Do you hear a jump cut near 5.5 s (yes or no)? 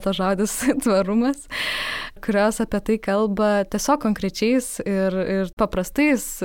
yes